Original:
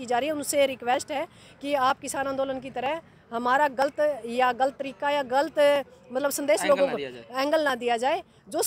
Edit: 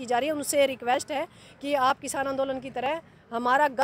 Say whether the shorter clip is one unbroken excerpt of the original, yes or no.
yes